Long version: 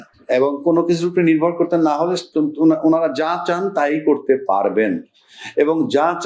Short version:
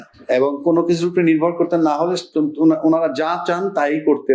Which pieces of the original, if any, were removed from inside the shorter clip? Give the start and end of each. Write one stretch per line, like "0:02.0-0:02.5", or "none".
none